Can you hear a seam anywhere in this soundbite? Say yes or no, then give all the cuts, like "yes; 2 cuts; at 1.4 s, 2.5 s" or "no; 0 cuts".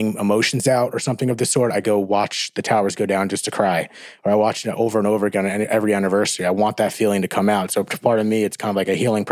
no; 0 cuts